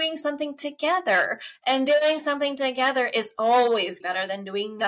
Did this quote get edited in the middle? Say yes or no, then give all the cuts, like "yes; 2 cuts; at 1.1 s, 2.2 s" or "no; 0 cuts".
yes; 1 cut; at 4.0 s